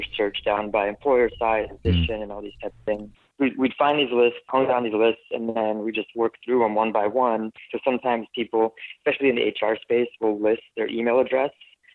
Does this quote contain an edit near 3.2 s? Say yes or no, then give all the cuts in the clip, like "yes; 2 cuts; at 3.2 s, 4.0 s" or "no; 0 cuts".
yes; 4 cuts; at 1.8 s, 3.2 s, 4.4 s, 7.7 s